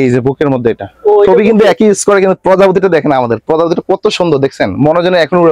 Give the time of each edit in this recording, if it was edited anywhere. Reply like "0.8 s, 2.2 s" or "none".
1.3 s